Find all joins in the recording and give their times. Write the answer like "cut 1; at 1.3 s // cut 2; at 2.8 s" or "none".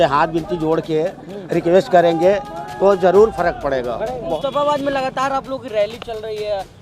cut 1; at 4.1 s